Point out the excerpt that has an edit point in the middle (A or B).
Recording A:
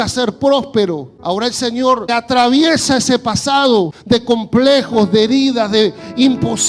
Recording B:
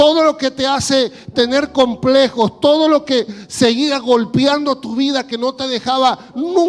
A